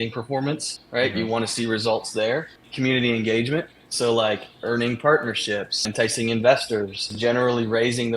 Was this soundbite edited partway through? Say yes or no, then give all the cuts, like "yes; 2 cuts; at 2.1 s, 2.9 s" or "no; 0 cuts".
yes; 3 cuts; at 2.5 s, 5.9 s, 7.0 s